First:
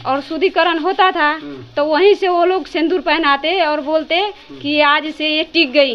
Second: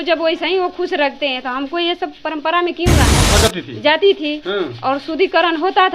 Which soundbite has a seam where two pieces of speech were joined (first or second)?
second